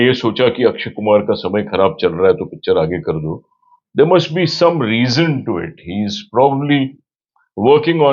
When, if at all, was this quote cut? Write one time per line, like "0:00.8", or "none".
none